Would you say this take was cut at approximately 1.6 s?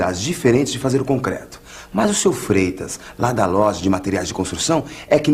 no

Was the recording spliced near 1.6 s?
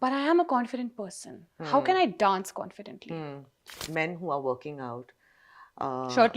no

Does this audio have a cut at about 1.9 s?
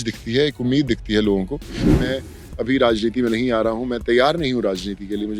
yes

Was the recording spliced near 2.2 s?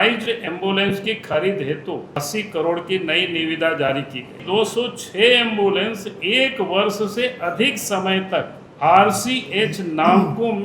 yes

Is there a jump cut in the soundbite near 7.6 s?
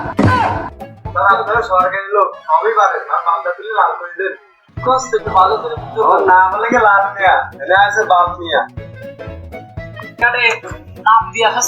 no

